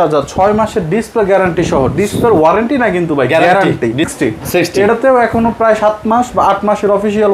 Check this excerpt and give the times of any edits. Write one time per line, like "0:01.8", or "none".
0:04.1